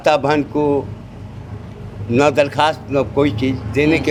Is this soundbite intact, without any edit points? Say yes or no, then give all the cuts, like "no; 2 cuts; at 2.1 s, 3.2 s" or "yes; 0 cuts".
yes; 0 cuts